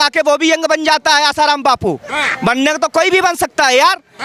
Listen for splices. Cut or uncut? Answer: uncut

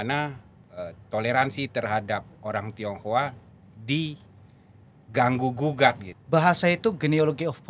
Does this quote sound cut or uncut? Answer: cut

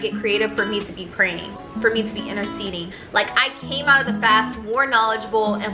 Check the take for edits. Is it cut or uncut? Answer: cut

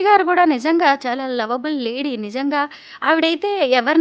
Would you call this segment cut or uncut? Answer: uncut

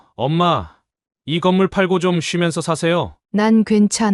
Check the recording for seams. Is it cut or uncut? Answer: cut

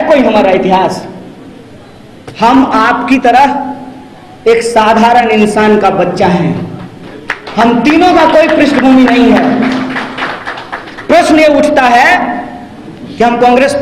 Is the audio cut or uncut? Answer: uncut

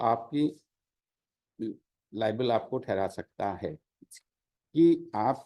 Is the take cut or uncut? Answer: uncut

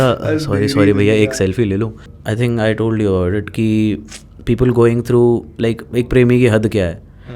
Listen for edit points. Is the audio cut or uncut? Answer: cut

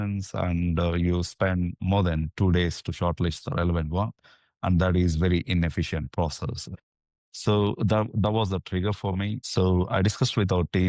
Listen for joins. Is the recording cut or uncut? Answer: cut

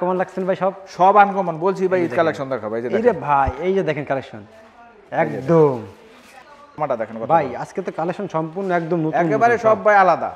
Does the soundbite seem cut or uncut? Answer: cut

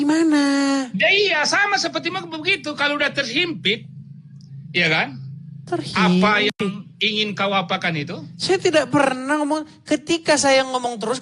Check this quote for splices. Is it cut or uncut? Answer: uncut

